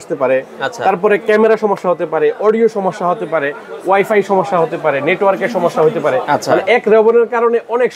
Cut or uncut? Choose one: uncut